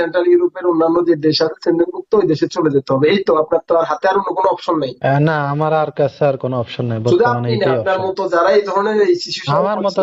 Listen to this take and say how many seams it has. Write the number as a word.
zero